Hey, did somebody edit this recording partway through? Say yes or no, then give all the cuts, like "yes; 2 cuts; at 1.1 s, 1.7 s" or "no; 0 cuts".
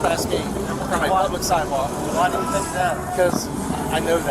yes; 1 cut; at 3.1 s